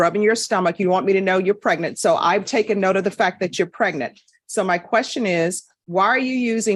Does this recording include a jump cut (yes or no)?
no